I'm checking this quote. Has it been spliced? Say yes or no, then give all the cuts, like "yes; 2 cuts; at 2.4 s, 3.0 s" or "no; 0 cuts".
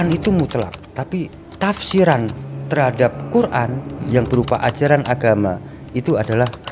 no; 0 cuts